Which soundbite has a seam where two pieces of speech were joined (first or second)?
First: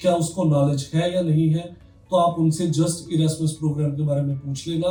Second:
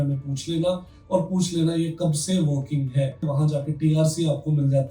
second